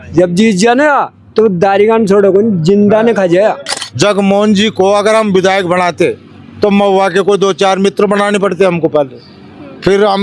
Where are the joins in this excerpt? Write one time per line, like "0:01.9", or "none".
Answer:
0:03.8